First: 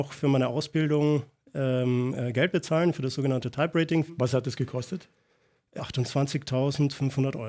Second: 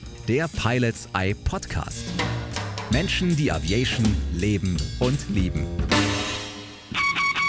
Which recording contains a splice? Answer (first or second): first